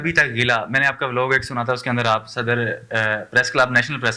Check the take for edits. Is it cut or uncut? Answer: uncut